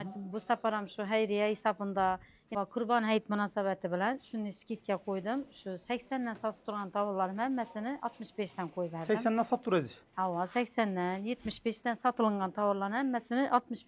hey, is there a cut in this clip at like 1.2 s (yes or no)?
no